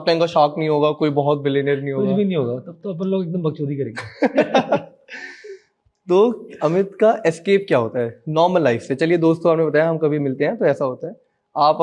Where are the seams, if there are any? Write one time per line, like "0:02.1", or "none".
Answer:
none

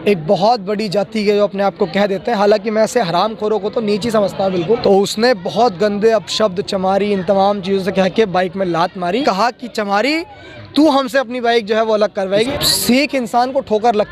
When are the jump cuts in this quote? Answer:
0:04.8
0:09.2
0:12.5

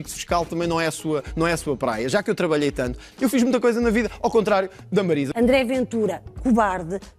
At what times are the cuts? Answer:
0:03.1
0:05.3

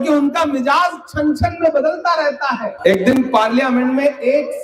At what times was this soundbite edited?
0:02.7

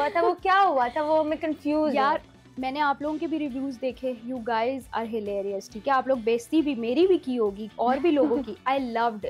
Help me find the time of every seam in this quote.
none

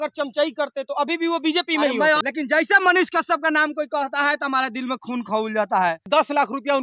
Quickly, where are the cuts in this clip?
0:02.2
0:06.1

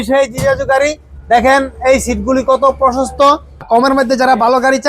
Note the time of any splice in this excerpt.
0:03.6

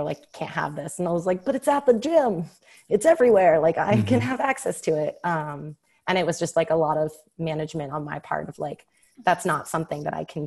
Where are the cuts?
none

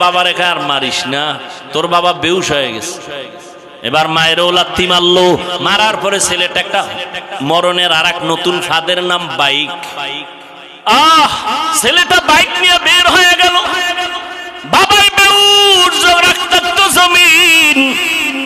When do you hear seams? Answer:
0:10.7

